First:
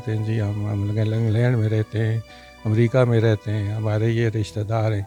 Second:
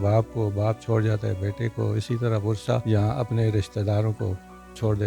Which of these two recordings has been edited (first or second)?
second